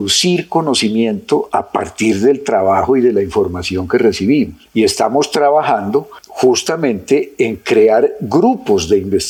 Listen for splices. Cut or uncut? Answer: uncut